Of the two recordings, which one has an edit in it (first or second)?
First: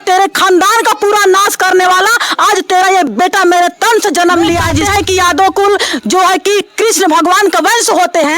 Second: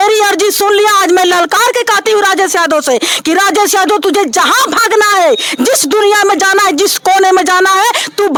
first